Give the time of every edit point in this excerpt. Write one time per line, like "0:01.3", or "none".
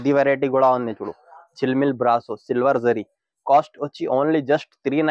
none